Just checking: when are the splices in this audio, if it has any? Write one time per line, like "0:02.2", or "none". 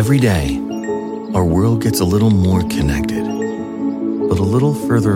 none